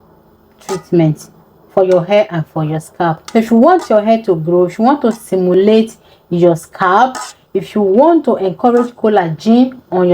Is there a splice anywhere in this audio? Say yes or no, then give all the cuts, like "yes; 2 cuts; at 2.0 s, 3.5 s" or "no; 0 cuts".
yes; 1 cut; at 3.2 s